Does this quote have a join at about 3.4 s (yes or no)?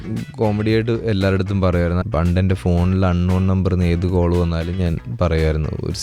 no